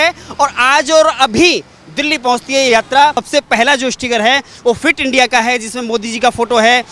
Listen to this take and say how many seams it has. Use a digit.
1